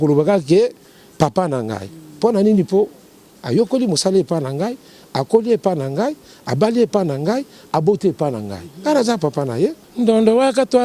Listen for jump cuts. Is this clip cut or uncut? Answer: cut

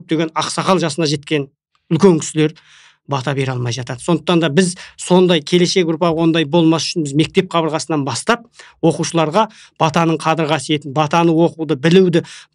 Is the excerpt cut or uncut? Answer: uncut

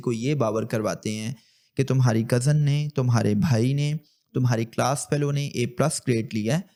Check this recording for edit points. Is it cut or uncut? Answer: uncut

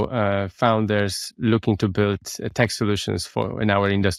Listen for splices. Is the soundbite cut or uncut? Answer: uncut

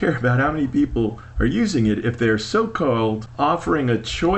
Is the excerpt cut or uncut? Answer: cut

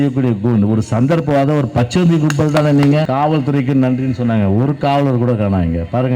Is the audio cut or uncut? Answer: cut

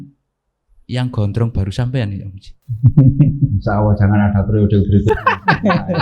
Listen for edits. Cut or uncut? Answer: uncut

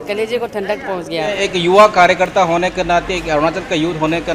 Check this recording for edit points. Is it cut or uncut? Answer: cut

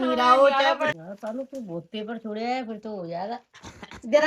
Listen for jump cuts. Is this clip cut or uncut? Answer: cut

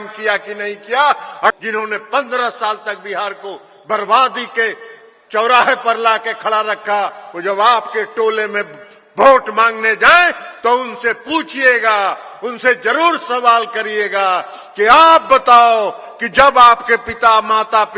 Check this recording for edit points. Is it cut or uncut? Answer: cut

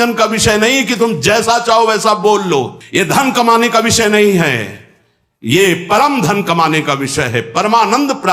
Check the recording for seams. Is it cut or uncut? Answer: cut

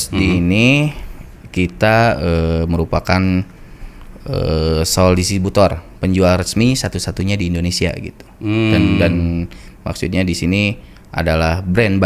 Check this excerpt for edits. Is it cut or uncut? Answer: uncut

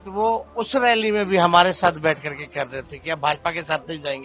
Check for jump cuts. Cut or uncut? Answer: uncut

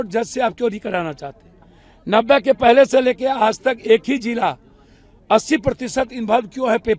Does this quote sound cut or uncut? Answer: uncut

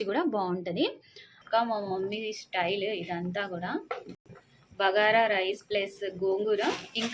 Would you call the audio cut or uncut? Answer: cut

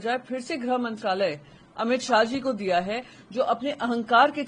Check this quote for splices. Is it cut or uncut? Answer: uncut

